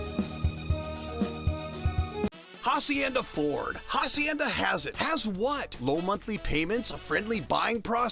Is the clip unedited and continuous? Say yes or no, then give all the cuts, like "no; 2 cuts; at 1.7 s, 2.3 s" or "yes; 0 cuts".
no; 1 cut; at 2.3 s